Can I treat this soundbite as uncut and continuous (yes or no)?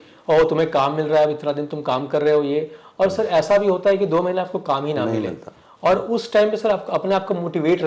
yes